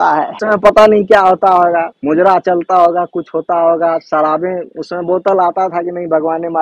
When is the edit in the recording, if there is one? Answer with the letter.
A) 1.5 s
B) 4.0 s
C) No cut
C